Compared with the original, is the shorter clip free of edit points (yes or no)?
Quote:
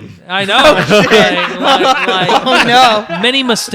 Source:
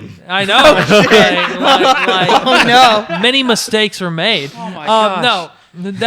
yes